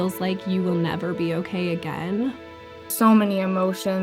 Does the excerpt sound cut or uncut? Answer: cut